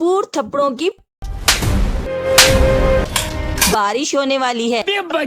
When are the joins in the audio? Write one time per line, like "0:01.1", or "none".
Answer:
none